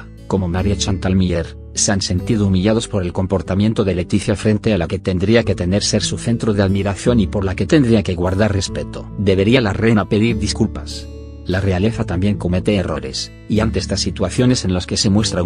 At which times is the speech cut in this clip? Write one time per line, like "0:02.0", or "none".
none